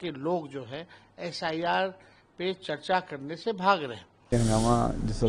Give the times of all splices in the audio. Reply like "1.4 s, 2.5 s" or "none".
4.1 s